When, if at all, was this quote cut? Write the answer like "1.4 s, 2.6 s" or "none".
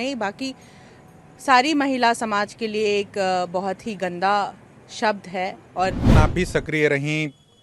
6.1 s